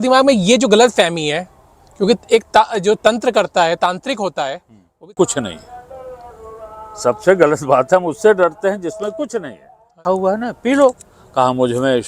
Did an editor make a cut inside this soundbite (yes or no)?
yes